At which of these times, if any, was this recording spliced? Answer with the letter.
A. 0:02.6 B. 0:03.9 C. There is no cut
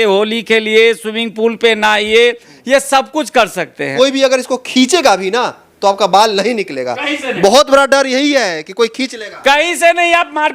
B